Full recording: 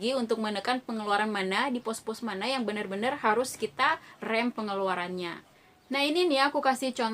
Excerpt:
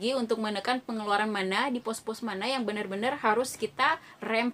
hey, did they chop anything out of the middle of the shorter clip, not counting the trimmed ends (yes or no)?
no